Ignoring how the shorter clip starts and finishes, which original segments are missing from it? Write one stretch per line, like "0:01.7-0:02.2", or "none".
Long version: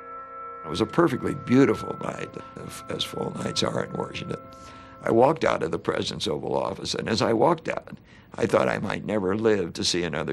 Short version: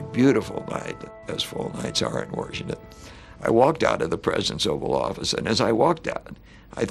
0:02.4-0:02.7